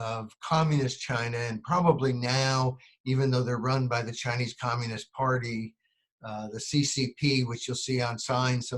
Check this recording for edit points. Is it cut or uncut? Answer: uncut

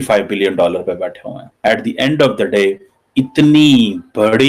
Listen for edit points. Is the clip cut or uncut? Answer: cut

